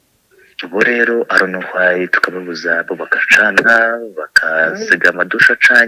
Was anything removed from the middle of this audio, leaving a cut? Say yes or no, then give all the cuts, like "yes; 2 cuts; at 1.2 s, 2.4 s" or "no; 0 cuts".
no; 0 cuts